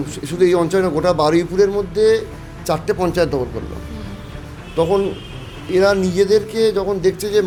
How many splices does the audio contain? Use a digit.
0